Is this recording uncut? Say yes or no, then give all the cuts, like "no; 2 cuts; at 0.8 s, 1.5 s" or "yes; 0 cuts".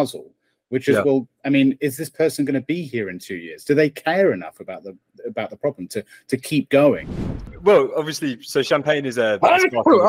no; 1 cut; at 7.5 s